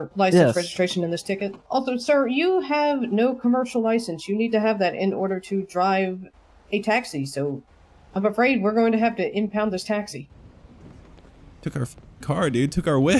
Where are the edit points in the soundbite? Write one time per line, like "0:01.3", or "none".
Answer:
0:01.5
0:10.9